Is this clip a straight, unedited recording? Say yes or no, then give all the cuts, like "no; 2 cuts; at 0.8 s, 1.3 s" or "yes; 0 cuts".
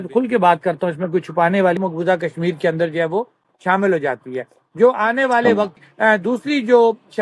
no; 2 cuts; at 1.8 s, 5.7 s